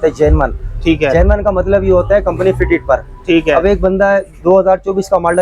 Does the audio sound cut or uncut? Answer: uncut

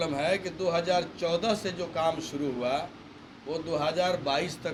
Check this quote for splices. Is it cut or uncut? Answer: uncut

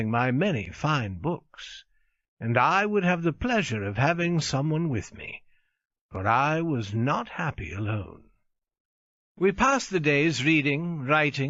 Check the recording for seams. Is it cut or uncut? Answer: uncut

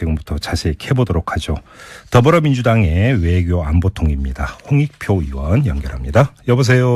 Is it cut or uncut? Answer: uncut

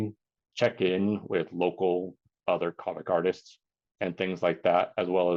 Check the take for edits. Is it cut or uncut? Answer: uncut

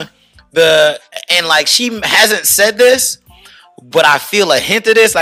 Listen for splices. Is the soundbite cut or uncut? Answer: uncut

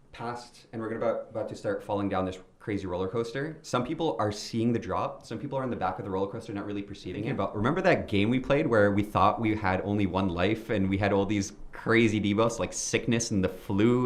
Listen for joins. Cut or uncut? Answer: cut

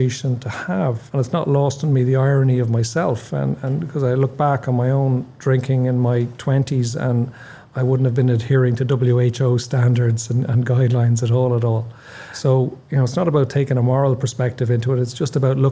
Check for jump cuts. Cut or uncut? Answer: uncut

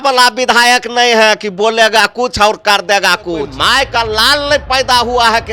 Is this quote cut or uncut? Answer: cut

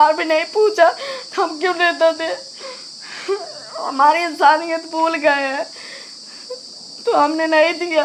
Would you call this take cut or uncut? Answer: uncut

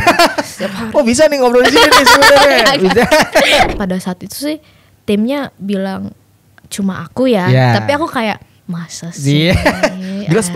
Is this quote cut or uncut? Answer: cut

